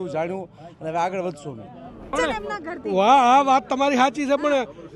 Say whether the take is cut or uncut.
cut